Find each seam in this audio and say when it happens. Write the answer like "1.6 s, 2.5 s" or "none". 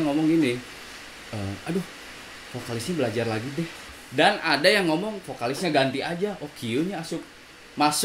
4.0 s